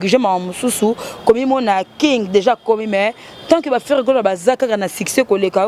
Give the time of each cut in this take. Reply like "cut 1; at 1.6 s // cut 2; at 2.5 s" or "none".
none